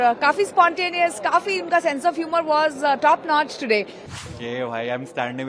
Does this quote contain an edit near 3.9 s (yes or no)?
yes